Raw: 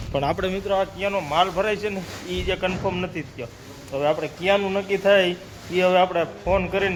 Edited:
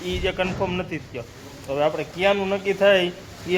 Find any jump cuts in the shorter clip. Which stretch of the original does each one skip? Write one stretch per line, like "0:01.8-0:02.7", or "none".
none